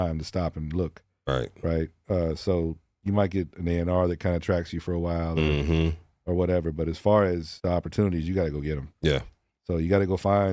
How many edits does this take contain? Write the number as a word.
one